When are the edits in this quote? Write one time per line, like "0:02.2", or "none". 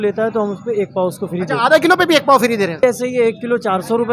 0:02.8